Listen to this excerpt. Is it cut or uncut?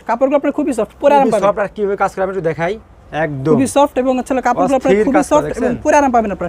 uncut